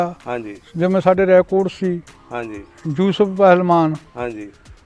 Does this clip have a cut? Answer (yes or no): no